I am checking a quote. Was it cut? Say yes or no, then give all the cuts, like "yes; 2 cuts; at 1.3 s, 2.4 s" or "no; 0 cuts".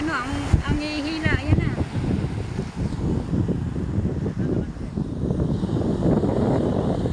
no; 0 cuts